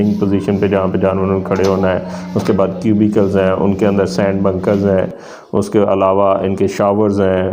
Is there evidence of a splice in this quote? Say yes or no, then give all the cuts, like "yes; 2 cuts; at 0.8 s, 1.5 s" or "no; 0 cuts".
no; 0 cuts